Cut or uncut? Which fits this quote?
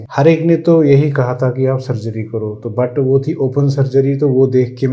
uncut